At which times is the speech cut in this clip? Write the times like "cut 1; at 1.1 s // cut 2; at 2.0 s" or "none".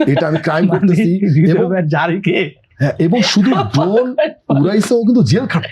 none